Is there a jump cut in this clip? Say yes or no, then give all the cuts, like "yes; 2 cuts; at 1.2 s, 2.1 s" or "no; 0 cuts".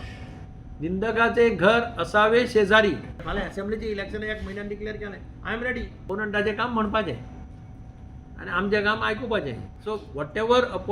yes; 3 cuts; at 3.2 s, 6.0 s, 9.7 s